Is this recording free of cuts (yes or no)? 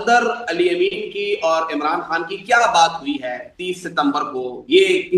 yes